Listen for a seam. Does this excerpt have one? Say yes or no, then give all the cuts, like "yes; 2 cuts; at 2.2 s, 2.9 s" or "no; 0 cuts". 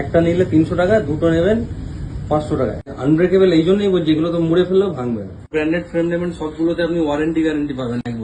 yes; 2 cuts; at 2.9 s, 5.5 s